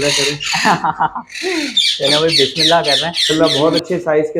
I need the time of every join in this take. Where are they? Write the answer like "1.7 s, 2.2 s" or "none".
3.3 s